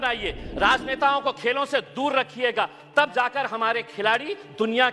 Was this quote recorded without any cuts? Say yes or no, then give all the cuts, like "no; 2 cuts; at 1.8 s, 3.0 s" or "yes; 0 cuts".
yes; 0 cuts